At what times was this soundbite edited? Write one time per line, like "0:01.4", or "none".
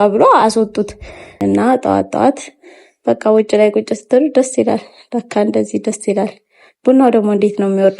0:01.2

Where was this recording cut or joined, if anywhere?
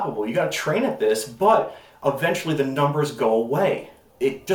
none

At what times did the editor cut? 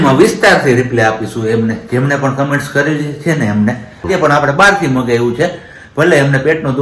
0:04.1

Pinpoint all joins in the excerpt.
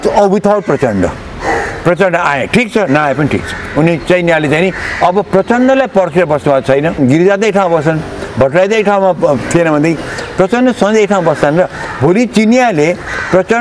0:07.0

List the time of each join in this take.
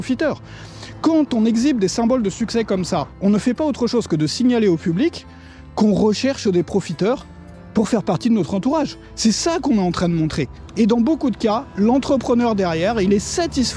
0:10.6

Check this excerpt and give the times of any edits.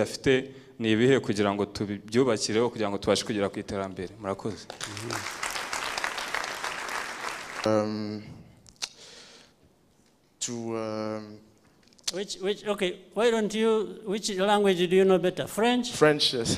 0:07.7

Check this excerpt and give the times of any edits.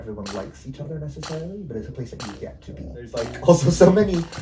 0:03.1

